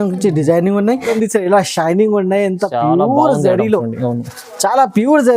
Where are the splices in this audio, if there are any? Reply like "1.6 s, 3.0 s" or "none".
1.1 s